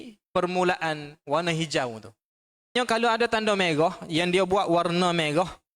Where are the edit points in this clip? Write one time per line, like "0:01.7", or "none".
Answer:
0:02.8